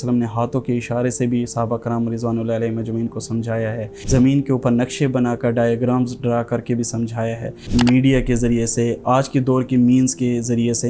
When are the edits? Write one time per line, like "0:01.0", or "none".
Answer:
0:03.9
0:07.6